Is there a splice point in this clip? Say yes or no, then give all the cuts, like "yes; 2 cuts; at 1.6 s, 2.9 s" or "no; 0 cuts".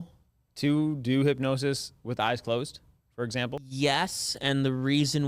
yes; 1 cut; at 3.7 s